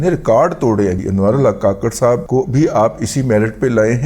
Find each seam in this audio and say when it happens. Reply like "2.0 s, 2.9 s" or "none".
1.0 s, 2.2 s